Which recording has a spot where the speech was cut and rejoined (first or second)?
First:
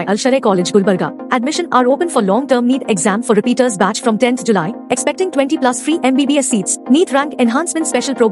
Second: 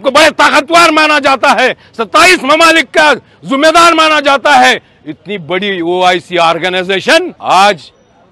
second